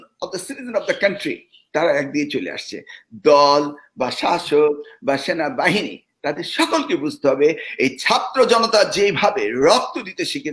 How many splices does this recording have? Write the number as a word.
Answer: zero